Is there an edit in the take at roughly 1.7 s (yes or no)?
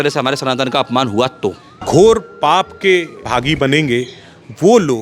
yes